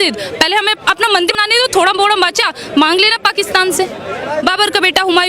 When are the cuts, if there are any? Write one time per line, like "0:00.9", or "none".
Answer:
0:01.3
0:04.4